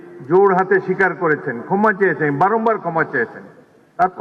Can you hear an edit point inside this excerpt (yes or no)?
no